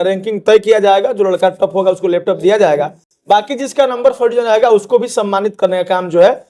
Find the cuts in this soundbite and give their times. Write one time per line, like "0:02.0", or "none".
none